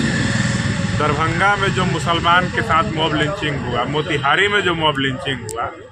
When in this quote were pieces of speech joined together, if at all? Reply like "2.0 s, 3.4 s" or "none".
none